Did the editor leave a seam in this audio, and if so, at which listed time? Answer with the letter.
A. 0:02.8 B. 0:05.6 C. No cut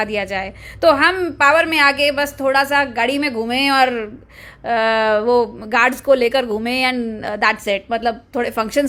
C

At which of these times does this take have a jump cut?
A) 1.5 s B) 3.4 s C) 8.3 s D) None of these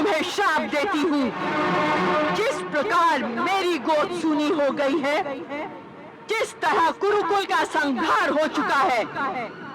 A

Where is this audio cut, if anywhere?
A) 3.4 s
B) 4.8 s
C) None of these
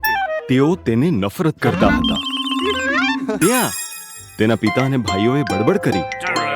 A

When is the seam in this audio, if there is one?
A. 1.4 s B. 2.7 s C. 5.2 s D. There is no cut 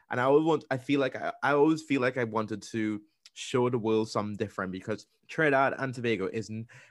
C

